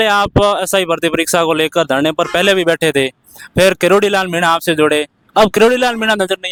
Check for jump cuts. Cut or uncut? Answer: uncut